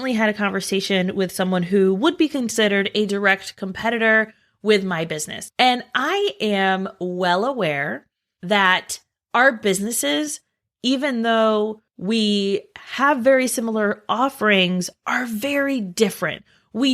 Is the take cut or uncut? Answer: cut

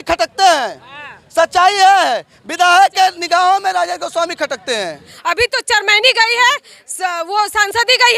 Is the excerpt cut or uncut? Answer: cut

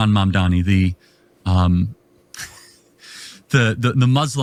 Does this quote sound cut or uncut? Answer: uncut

